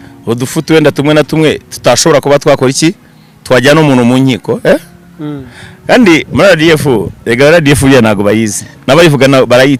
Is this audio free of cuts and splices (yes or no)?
yes